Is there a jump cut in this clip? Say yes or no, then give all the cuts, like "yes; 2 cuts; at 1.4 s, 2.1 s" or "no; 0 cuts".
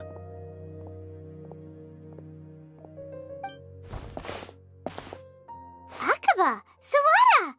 yes; 1 cut; at 3.7 s